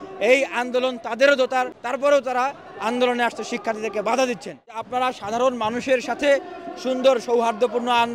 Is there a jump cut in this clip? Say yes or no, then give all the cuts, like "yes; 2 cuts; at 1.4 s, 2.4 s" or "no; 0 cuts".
yes; 2 cuts; at 1.8 s, 4.8 s